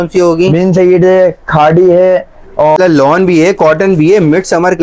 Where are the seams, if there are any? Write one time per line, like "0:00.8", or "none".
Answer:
0:02.8

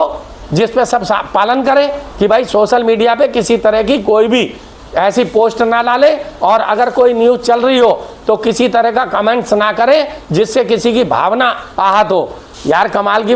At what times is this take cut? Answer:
none

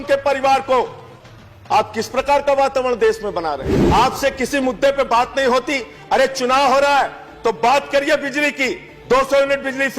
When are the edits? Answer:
0:03.7

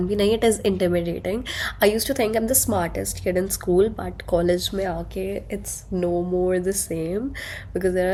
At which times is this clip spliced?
none

